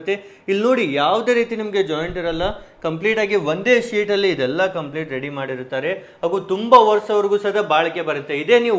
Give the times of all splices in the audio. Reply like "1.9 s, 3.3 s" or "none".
none